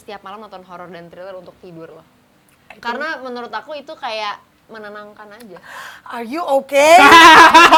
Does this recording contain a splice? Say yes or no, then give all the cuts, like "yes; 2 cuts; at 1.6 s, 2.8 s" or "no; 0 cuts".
no; 0 cuts